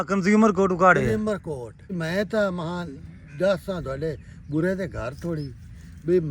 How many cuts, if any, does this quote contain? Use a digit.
1